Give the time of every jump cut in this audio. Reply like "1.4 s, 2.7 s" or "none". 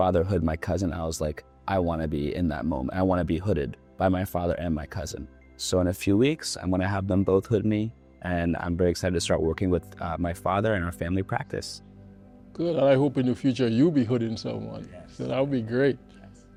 none